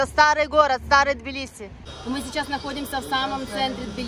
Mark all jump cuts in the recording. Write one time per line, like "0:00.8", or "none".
0:01.5